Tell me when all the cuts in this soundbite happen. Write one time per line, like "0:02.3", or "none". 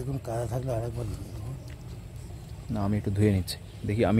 none